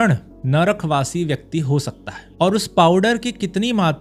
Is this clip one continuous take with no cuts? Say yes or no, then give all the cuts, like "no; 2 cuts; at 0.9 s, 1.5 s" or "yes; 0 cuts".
yes; 0 cuts